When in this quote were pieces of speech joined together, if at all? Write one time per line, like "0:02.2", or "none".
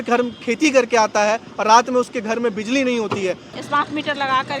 0:03.5